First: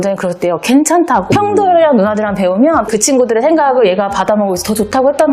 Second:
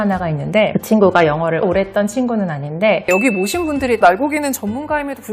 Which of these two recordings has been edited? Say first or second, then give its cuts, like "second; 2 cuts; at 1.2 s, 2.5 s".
second; 1 cut; at 3.0 s